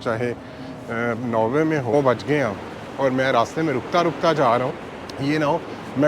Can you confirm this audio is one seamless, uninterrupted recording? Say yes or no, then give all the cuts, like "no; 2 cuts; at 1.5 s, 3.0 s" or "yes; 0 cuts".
no; 2 cuts; at 1.9 s, 4.8 s